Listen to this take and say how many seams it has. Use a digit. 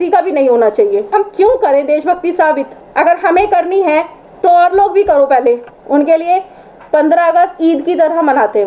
4